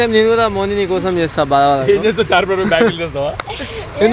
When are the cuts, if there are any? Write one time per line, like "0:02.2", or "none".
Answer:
none